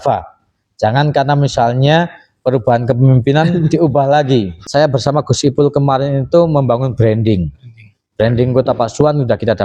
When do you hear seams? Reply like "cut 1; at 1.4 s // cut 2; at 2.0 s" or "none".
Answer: cut 1; at 4.6 s